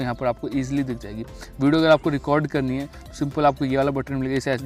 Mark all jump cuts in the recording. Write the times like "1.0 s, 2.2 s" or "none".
none